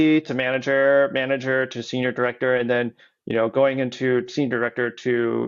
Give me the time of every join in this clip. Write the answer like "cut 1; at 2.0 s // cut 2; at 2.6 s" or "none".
none